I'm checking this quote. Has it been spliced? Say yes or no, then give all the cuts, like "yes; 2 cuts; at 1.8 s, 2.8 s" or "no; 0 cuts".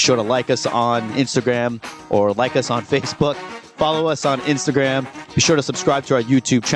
no; 0 cuts